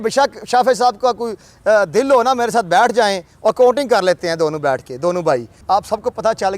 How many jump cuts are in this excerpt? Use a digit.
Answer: 1